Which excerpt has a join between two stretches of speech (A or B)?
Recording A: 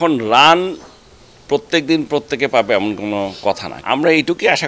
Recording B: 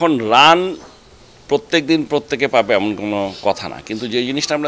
A